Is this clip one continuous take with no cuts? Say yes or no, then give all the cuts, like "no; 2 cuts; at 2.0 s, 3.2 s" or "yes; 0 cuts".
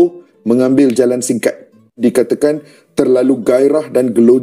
no; 1 cut; at 2.0 s